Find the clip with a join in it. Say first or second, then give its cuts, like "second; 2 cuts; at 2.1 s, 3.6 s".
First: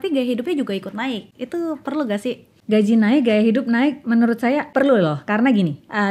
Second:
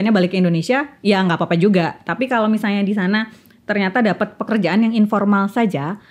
first; 3 cuts; at 1.3 s, 2.5 s, 4.7 s